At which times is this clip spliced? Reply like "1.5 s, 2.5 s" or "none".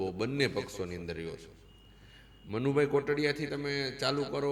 none